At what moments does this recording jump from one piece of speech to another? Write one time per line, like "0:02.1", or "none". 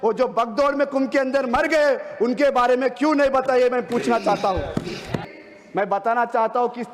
0:05.3

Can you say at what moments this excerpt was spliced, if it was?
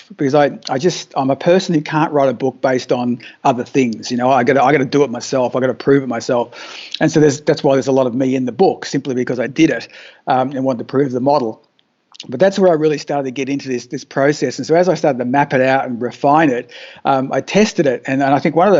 none

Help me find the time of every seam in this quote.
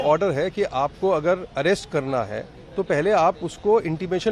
none

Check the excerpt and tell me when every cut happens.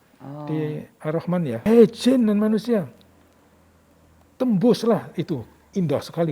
0:01.7

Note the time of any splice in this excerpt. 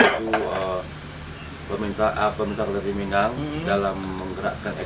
none

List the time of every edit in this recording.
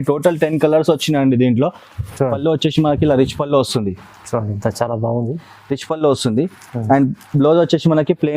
0:02.1

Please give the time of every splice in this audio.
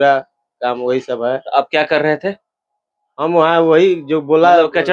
none

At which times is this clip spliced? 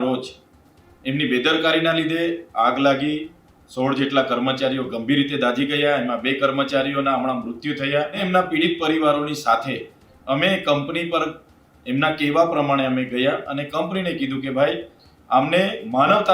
0:08.2

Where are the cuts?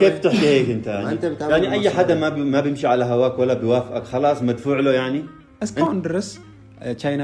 0:05.4

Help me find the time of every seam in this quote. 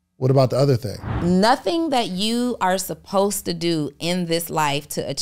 0:01.2

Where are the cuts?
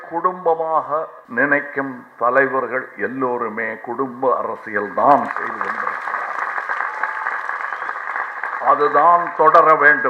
0:01.2

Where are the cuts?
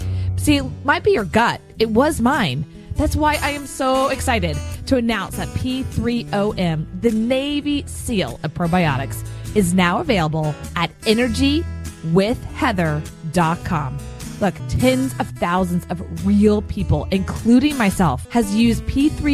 0:14.7
0:18.2

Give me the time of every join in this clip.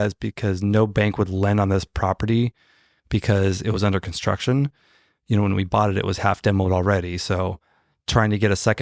none

